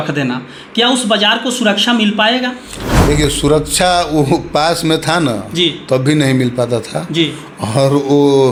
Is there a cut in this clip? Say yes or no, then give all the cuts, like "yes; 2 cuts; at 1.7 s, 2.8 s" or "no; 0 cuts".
no; 0 cuts